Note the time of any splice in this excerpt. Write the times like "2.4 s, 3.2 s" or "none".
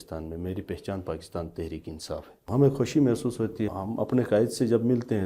2.5 s, 3.7 s

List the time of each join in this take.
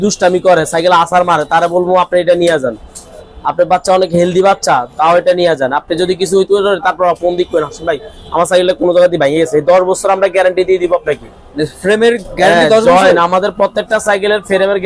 none

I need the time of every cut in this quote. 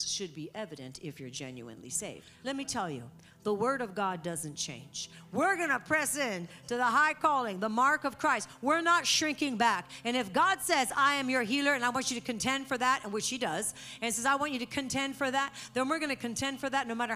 2.3 s

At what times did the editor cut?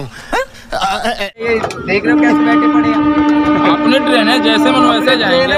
1.3 s

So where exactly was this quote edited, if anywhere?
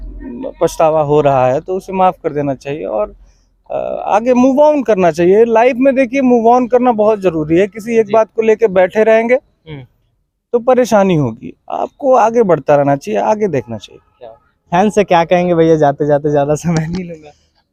none

